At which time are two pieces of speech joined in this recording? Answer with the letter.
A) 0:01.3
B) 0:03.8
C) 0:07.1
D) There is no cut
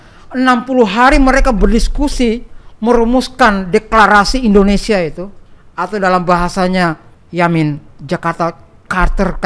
C